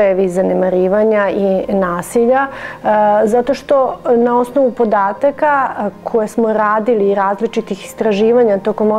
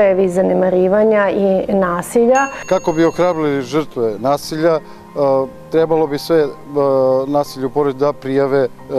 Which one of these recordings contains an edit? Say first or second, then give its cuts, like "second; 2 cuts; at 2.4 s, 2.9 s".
second; 1 cut; at 2.6 s